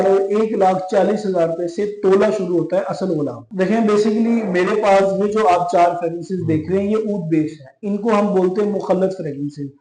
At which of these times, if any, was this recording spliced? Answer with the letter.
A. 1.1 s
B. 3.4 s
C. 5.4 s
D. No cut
B